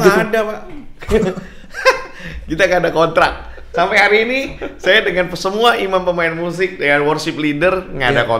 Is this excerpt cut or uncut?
uncut